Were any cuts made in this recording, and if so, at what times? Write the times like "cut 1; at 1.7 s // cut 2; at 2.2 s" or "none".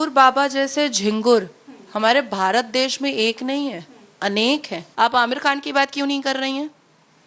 cut 1; at 4.8 s